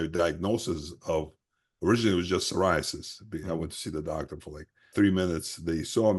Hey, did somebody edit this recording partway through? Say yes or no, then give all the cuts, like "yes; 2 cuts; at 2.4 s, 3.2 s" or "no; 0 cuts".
yes; 1 cut; at 4.9 s